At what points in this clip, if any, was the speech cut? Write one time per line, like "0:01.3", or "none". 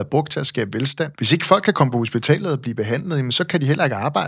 0:01.2

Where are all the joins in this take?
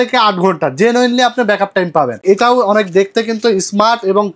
0:02.2

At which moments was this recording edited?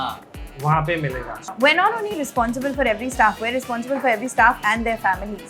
0:01.5

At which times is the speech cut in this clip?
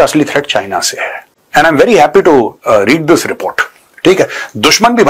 none

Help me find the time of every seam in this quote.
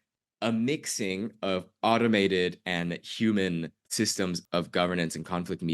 0:04.2

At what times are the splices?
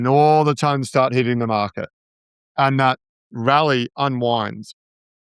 0:03.3

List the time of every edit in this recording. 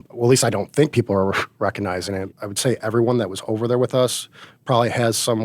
0:02.4

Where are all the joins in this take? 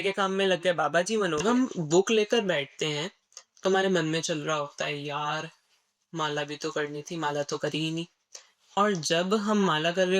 0:01.4

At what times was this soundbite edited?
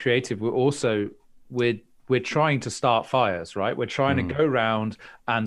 none

